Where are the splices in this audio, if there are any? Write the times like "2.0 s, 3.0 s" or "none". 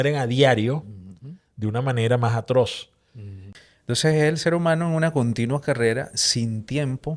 3.5 s